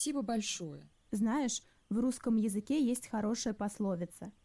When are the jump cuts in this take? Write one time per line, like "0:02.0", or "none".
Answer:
0:01.6